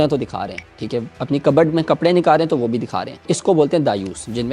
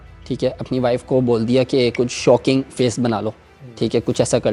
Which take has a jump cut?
first; 1 cut; at 3.3 s

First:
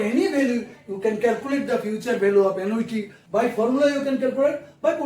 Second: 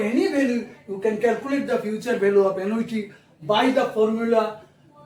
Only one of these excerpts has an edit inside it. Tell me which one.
first; 1 cut; at 3.2 s

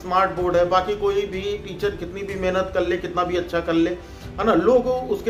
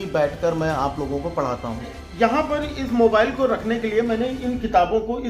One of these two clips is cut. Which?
second; 1 cut; at 2.0 s

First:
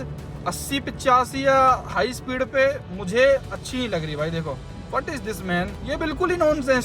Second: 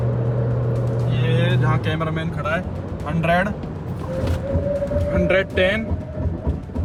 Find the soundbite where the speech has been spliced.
first; 2 cuts; at 4.7 s, 5.8 s

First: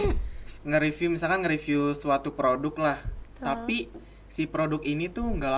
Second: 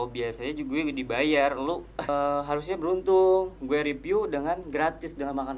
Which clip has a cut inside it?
second; 1 cut; at 2.1 s

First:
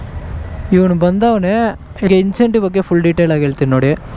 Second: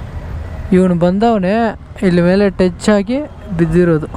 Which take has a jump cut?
first; 1 cut; at 1.9 s

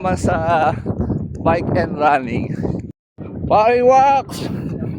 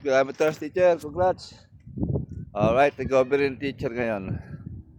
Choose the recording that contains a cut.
first; 1 cut; at 2.9 s

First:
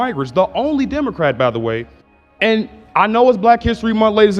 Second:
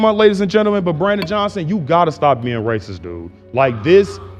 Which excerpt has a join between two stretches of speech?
first; 1 cut; at 2.0 s

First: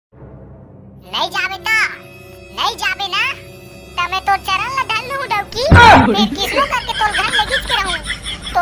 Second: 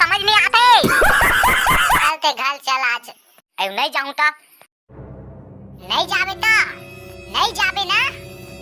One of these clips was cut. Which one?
second; 1 cut; at 2.0 s

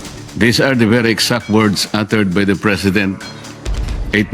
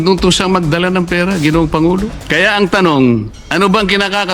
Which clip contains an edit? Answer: second; 2 cuts; at 2.2 s, 3.4 s

